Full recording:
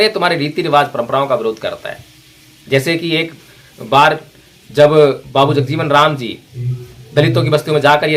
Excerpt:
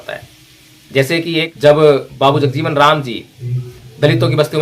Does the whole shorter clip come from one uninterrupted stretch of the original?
no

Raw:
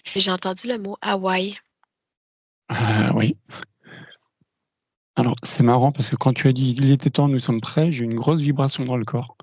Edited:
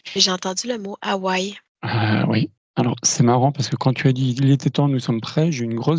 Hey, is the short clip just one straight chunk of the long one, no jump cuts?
no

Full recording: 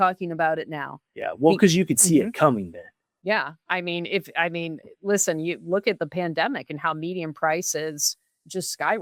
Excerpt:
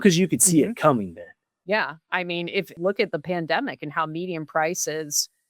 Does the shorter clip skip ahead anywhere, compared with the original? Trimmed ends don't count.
yes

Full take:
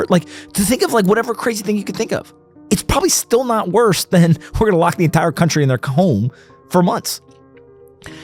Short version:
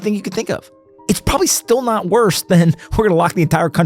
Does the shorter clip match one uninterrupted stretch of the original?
yes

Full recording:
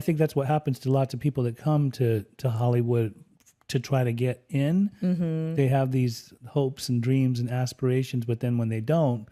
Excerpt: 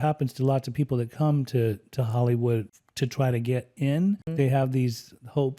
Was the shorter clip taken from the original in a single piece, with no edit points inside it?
no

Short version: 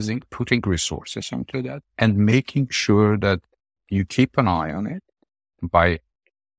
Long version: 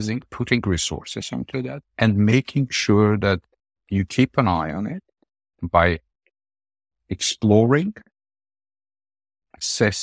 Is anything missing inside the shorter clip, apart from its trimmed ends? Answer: no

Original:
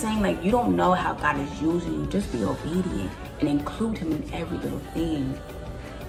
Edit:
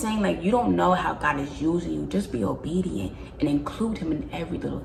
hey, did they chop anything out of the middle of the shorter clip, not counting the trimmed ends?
no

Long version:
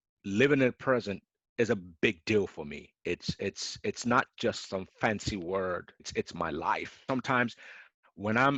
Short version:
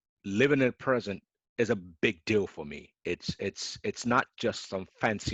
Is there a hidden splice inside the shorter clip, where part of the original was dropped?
no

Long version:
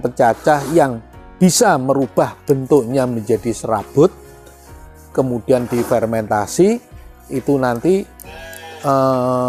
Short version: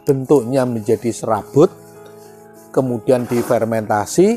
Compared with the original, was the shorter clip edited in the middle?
no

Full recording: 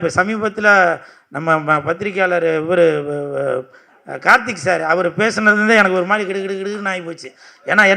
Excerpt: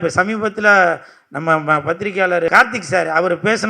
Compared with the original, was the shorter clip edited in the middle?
yes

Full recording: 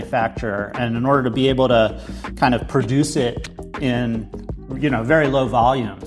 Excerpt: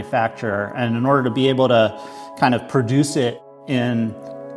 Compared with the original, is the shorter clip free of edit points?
no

